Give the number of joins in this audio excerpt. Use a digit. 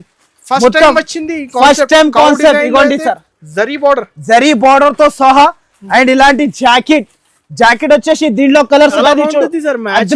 1